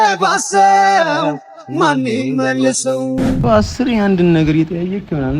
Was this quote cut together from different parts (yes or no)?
yes